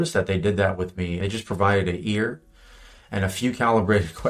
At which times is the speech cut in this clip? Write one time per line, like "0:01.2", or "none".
0:01.1